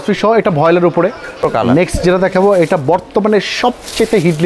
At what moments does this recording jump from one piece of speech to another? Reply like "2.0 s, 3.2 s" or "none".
1.5 s